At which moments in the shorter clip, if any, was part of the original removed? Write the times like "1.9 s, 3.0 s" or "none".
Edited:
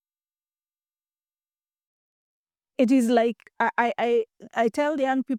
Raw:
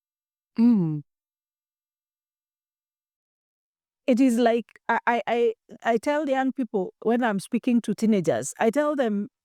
none

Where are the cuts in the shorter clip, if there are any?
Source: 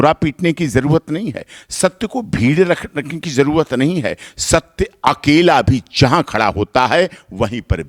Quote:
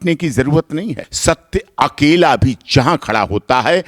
1.0 s

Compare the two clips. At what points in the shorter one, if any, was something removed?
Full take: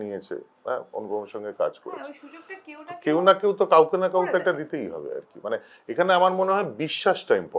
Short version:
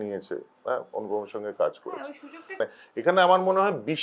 2.4 s

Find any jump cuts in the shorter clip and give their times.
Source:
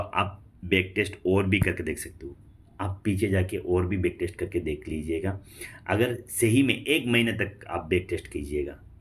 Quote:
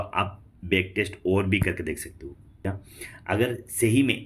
2.6 s

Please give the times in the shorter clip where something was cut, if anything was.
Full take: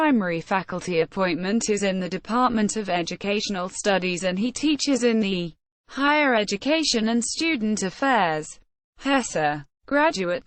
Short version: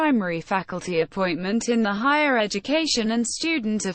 1.6 s

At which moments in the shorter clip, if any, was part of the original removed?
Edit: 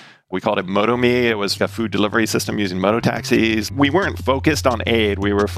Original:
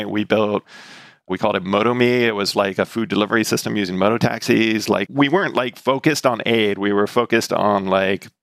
1.5 s, 4.0 s

